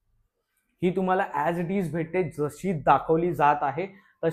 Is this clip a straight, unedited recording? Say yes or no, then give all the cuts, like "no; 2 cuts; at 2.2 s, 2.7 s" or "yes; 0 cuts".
yes; 0 cuts